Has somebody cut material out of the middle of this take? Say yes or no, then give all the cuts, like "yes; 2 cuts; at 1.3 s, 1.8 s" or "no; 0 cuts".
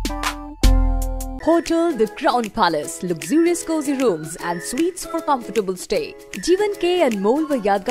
yes; 1 cut; at 1.3 s